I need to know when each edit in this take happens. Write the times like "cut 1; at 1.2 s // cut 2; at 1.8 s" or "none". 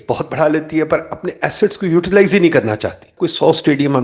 cut 1; at 3.0 s